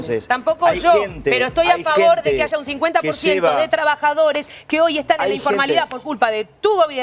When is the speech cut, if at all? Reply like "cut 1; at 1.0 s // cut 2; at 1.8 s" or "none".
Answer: none